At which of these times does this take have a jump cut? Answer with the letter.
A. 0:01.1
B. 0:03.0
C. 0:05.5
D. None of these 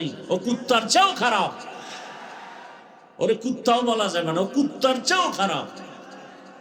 B